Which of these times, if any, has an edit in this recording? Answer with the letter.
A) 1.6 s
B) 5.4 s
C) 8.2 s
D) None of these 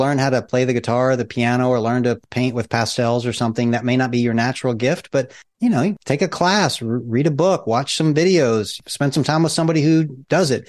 D